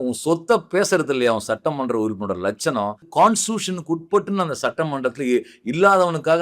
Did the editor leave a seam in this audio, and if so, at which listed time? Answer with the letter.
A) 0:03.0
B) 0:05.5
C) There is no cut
A